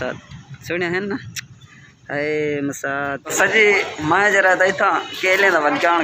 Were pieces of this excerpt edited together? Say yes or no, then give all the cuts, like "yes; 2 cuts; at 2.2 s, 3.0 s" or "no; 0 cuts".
yes; 1 cut; at 3.3 s